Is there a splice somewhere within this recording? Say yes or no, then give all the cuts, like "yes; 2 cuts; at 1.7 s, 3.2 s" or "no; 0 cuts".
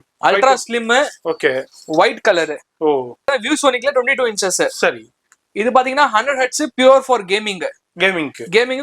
yes; 1 cut; at 3.3 s